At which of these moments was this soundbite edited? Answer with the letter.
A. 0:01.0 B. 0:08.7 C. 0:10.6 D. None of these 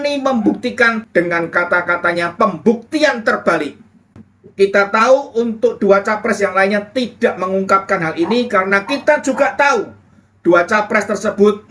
A